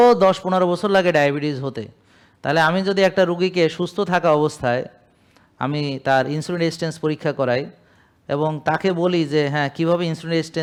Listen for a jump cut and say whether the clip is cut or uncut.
uncut